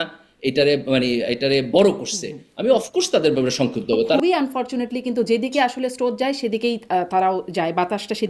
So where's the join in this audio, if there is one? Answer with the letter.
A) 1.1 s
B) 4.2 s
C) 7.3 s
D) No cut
B